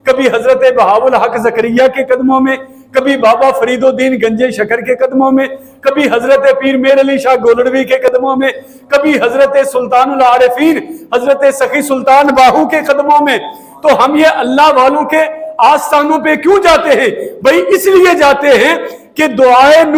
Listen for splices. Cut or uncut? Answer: uncut